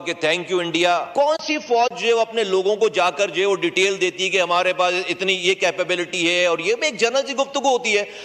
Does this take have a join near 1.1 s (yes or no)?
yes